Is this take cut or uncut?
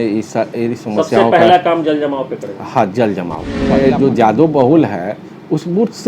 cut